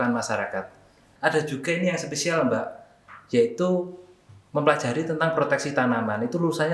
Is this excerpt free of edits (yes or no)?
no